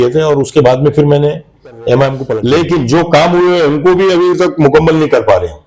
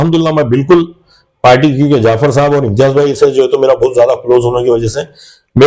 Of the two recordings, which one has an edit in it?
first; 1 cut; at 2.3 s

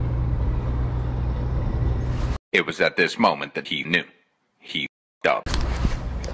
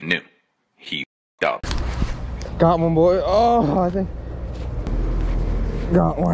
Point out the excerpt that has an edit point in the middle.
second; 1 cut; at 4.9 s

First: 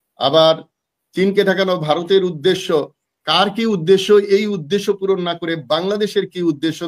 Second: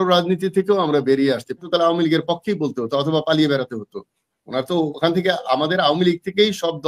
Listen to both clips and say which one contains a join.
second; 1 cut; at 1.6 s

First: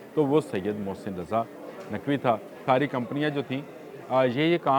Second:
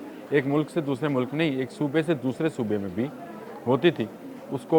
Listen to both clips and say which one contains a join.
first; 1 cut; at 2.5 s

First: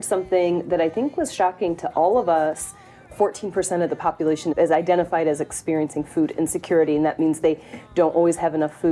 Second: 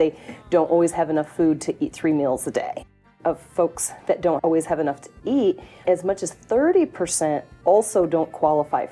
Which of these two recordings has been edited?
second; 2 cuts; at 3.0 s, 4.4 s

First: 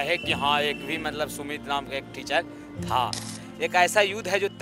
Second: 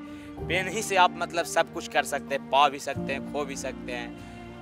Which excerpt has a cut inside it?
first; 1 cut; at 3.4 s

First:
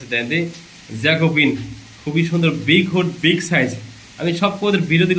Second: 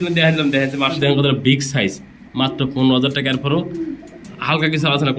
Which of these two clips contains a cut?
second; 1 cut; at 1.0 s

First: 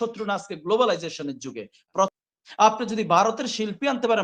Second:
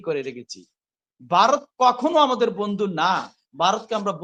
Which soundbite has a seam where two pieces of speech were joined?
first; 1 cut; at 2.2 s

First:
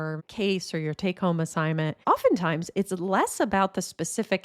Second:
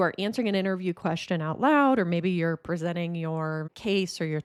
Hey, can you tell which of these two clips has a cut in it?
first; 1 cut; at 2.0 s

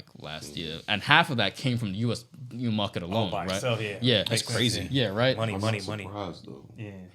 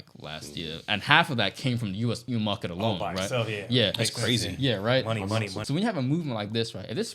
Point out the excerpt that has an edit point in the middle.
second; 2 cuts; at 2.2 s, 5.6 s

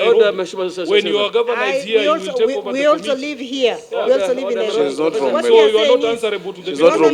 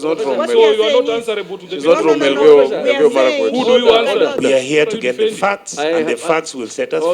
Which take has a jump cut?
second; 1 cut; at 4.4 s

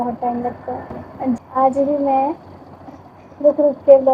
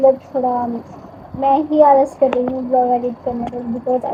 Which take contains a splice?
first; 1 cut; at 1.4 s

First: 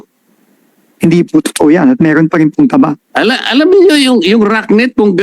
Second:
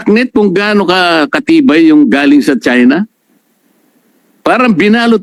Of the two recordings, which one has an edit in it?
first; 1 cut; at 3.0 s

